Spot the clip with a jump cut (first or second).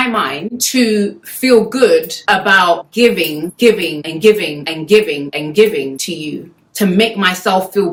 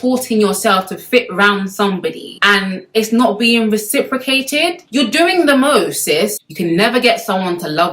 second